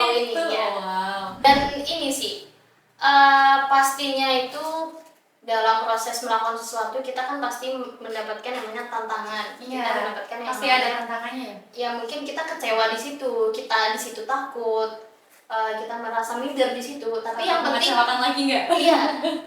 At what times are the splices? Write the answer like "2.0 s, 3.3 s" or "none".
1.4 s